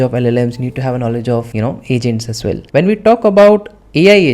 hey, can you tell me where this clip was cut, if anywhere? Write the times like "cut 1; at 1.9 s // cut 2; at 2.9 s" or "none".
cut 1; at 1.5 s // cut 2; at 2.6 s